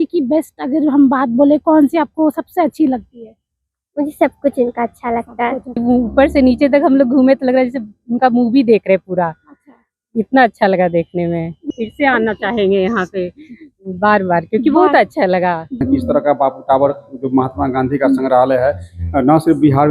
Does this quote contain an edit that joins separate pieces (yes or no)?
yes